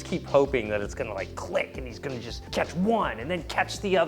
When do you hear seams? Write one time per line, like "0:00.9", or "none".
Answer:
0:02.3